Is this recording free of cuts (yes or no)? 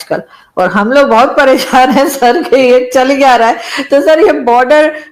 yes